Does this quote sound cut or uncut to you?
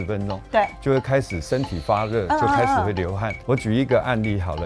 cut